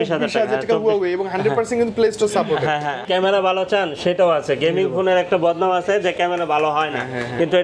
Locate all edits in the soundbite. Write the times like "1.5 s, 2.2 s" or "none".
3.0 s